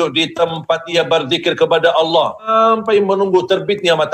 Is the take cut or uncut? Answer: cut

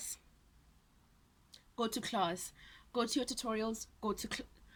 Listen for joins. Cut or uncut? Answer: uncut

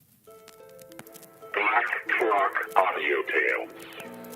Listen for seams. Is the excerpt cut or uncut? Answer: cut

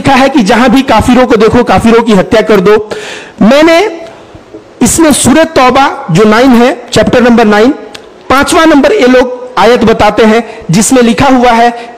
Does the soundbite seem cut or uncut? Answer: uncut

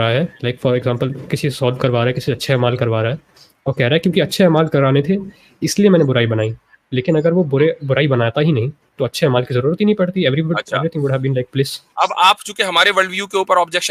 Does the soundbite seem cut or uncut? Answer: uncut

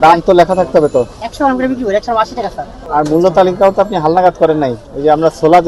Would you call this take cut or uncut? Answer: cut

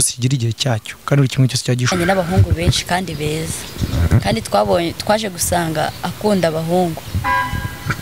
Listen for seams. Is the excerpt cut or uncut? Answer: cut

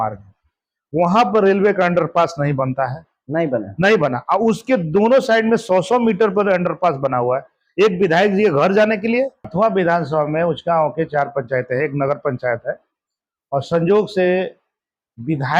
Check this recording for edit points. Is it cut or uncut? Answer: cut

